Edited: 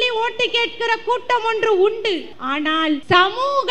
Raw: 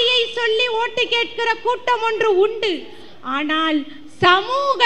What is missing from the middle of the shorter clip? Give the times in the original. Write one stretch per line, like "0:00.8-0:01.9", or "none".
0:03.3-0:03.9

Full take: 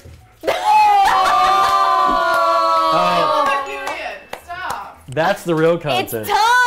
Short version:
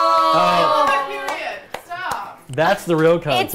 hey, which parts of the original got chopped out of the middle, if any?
none

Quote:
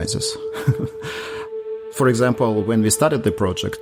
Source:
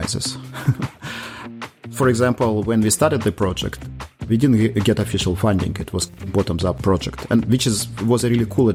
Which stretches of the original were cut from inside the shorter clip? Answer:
none

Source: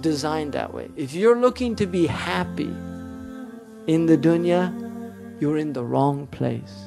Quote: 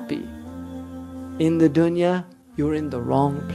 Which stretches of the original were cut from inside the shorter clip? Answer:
0:04.8-0:05.2

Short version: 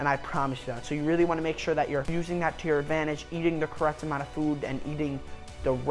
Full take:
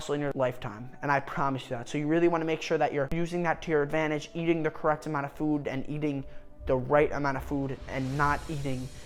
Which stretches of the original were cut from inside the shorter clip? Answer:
none

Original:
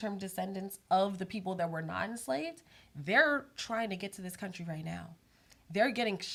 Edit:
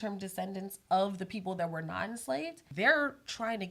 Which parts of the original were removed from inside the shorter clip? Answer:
0:02.6-0:02.9

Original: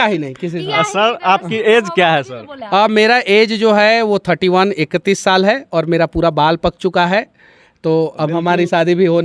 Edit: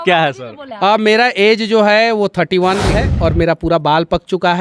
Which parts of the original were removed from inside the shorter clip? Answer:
0:04.9-0:05.5

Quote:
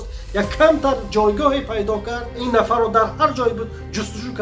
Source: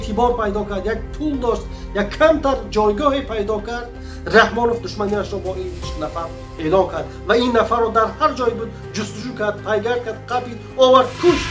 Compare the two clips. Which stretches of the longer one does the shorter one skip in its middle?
0:04.0-0:07.5

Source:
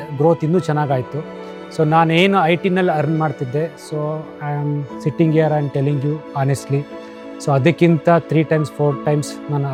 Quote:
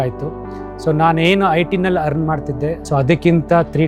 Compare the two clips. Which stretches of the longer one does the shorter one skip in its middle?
0:03.7-0:07.4

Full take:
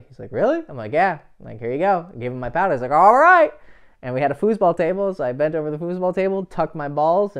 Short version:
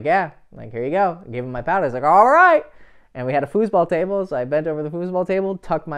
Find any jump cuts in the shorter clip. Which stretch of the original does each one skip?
none

